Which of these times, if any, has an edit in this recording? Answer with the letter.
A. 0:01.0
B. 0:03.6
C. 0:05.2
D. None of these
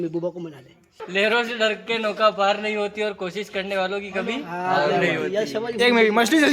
A